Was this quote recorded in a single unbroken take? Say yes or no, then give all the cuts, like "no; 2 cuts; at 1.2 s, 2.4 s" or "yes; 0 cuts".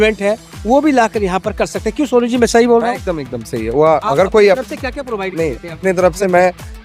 yes; 0 cuts